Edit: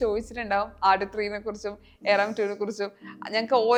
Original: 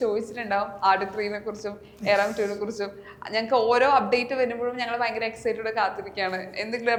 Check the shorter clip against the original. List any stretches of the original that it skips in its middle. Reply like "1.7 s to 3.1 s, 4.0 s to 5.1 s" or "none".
none